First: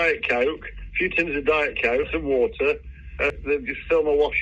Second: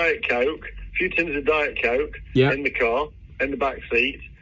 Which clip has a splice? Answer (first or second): first